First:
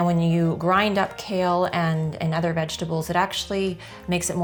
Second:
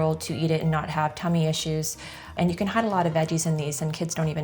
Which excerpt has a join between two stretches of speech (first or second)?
second